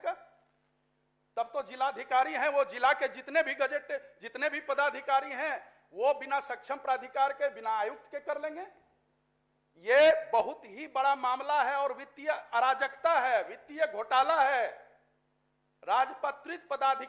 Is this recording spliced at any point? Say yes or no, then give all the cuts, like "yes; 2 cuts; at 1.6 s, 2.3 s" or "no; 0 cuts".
no; 0 cuts